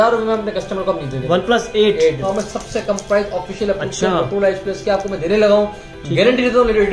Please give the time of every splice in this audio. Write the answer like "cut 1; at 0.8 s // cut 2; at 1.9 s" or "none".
cut 1; at 2.2 s